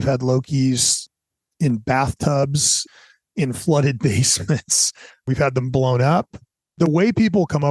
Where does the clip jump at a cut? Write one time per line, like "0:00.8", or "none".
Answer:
0:05.3